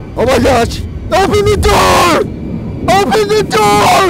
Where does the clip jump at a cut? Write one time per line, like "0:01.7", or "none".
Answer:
none